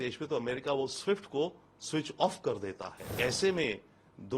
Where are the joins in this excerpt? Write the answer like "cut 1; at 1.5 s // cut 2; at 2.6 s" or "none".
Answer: cut 1; at 3.1 s